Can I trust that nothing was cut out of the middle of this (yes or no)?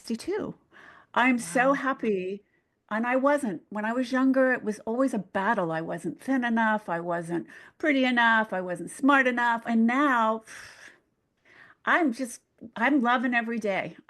no